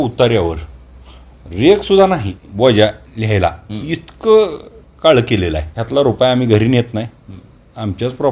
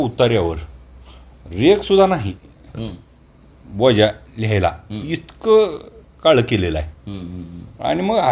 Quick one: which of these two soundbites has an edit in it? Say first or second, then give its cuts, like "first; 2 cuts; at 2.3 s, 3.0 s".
first; 2 cuts; at 2.4 s, 5.7 s